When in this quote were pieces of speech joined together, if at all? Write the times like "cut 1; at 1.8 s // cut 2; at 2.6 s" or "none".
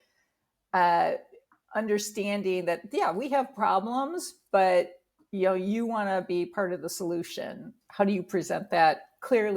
cut 1; at 7.8 s